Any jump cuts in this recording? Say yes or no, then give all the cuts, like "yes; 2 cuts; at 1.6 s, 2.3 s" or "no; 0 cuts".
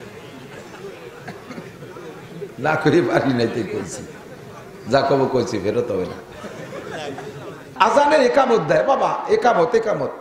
yes; 1 cut; at 7.6 s